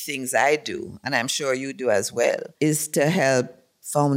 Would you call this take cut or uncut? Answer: cut